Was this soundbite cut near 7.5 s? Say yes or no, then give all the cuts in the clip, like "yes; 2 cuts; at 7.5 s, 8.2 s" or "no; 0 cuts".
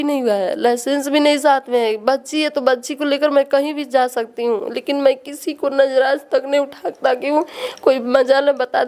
no; 0 cuts